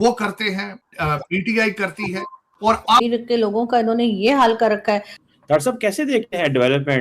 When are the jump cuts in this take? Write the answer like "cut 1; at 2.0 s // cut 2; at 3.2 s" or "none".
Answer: cut 1; at 3.0 s